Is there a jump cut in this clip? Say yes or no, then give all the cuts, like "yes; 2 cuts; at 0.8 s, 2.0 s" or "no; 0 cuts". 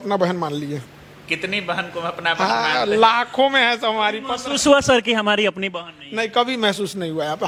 no; 0 cuts